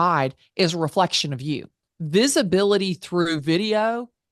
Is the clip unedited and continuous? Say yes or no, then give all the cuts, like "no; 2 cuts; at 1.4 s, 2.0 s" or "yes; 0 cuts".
no; 1 cut; at 1.9 s